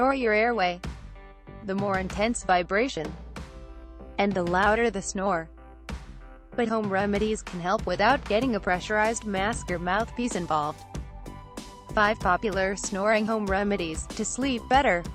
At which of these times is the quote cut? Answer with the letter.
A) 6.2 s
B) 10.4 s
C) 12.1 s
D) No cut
B